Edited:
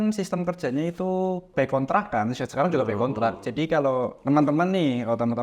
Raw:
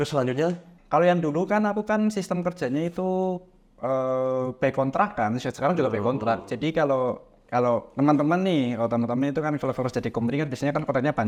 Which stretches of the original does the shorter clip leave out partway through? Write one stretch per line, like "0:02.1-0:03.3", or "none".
0:03.5-0:04.5
0:07.2-0:07.9